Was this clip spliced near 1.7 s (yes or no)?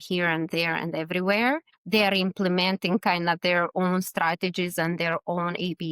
yes